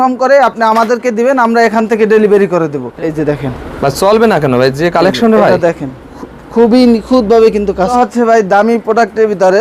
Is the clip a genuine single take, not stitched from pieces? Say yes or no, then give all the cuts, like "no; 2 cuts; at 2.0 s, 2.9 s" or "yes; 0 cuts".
no; 2 cuts; at 2.8 s, 7.9 s